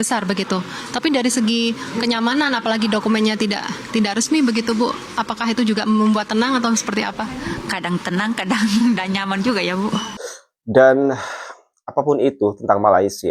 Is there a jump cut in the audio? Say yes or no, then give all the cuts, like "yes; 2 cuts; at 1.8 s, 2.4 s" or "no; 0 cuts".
yes; 1 cut; at 10.1 s